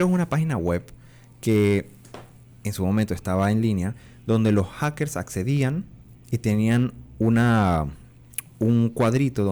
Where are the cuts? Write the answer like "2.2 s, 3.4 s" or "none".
none